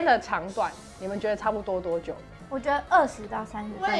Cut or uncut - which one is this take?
uncut